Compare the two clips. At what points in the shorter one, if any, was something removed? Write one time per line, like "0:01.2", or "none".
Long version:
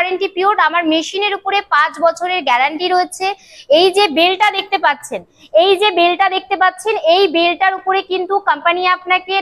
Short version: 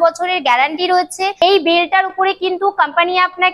0:01.4